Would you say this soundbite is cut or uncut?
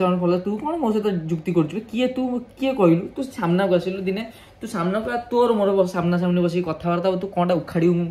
uncut